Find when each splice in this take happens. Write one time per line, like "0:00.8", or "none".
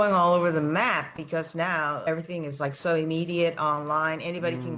0:02.1